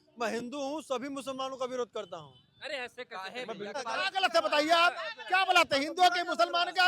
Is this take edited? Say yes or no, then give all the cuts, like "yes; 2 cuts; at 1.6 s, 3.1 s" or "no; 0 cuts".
yes; 1 cut; at 3.8 s